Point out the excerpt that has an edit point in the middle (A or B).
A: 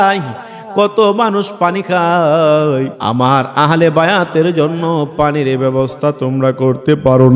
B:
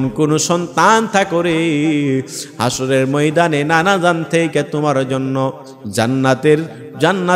A